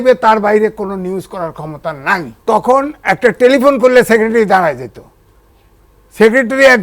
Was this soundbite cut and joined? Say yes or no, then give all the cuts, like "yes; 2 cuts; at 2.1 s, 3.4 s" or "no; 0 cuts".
yes; 1 cut; at 2.3 s